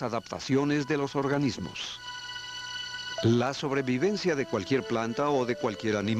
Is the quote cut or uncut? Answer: uncut